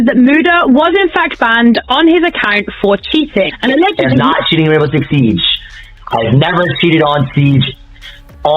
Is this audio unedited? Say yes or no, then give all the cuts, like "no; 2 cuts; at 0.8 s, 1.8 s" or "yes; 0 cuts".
no; 1 cut; at 4.0 s